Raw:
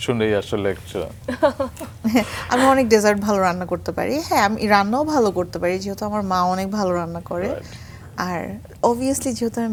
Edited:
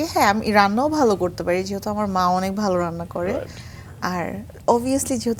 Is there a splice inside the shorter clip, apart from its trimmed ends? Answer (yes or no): no